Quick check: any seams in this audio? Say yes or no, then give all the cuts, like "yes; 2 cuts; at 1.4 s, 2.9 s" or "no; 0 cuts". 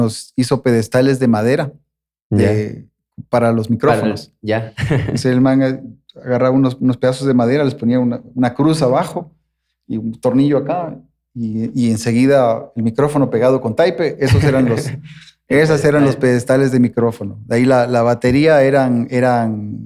no; 0 cuts